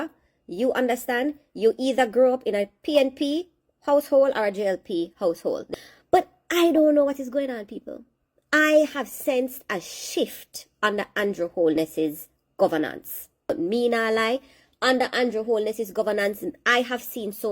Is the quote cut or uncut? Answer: cut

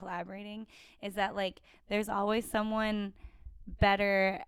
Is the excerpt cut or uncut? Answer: uncut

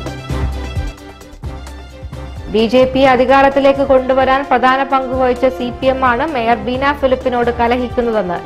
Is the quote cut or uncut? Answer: uncut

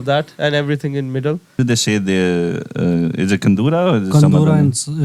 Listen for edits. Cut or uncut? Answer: cut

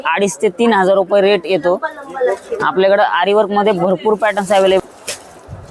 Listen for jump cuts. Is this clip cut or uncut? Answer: cut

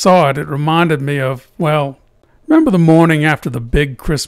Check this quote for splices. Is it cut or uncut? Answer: uncut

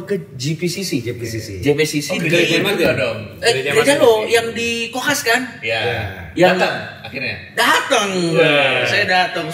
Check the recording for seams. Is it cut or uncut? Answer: uncut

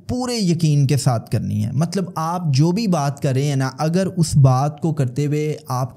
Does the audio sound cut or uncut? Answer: uncut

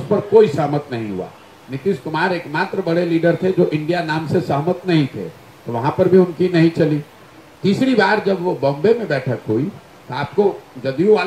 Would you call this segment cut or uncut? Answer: uncut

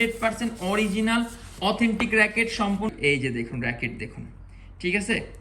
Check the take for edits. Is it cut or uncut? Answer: cut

